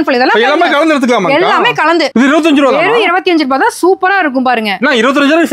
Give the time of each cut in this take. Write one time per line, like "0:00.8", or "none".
0:02.1